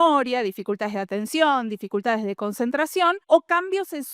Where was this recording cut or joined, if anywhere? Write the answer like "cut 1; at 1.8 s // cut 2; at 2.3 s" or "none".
cut 1; at 3.2 s